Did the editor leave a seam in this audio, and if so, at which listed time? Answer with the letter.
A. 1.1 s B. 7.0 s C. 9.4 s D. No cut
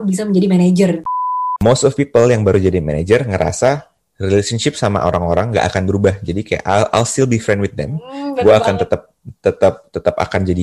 A